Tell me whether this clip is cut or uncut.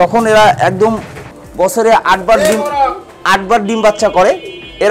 cut